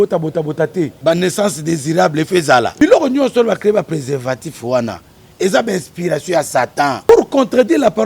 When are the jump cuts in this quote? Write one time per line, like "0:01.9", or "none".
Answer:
0:01.0
0:02.7
0:07.1